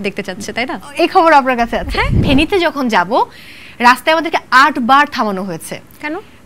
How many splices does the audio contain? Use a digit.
1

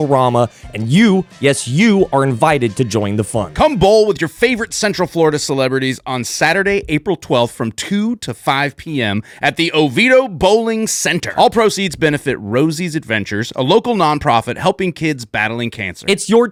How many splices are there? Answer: 0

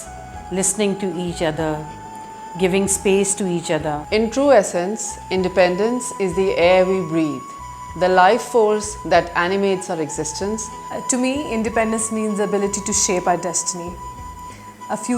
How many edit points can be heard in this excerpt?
2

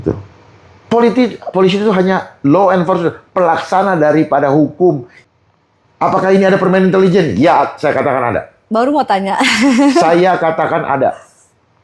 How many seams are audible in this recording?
1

